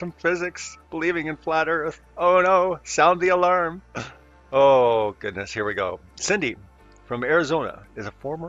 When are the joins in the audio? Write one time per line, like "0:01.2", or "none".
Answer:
0:01.7